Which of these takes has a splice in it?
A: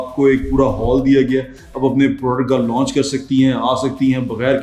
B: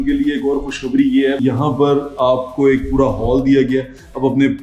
B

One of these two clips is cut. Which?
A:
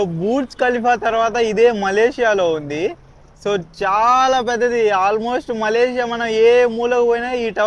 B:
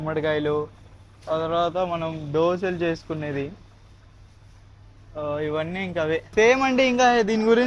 B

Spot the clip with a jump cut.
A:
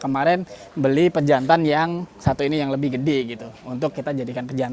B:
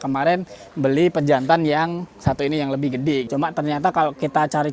B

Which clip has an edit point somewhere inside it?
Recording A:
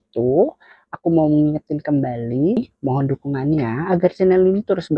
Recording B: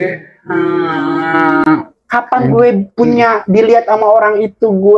A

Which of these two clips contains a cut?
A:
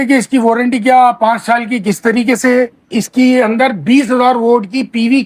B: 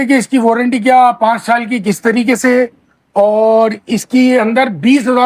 A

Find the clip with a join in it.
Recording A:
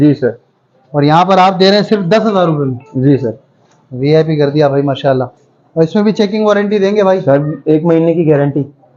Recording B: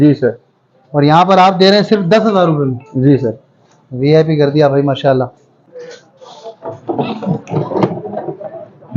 B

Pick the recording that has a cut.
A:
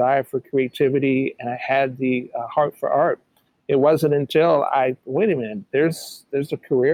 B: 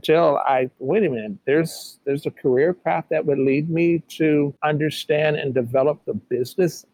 B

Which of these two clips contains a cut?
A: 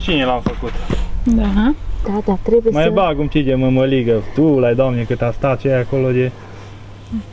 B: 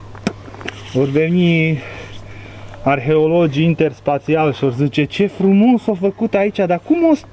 A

